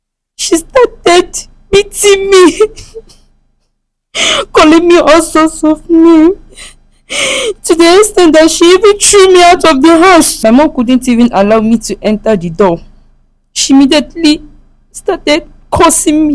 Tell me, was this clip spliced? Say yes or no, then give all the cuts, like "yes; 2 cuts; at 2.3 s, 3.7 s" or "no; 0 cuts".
yes; 1 cut; at 10.3 s